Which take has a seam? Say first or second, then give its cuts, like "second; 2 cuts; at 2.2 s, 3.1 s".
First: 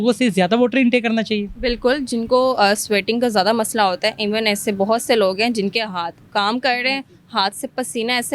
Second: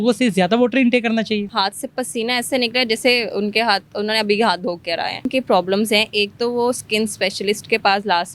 second; 2 cuts; at 1.5 s, 5.3 s